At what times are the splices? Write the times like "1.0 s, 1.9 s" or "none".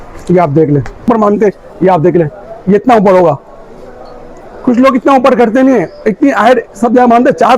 1.0 s

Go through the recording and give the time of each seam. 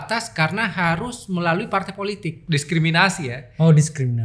2.4 s

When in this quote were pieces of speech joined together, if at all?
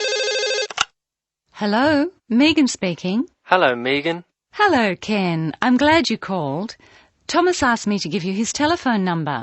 1.0 s

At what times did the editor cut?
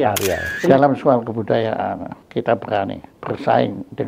0.7 s, 2.2 s, 3.1 s

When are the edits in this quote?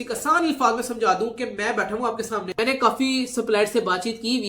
2.5 s

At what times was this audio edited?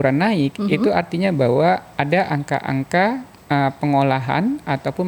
none

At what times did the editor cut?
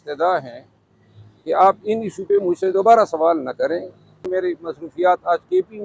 4.3 s

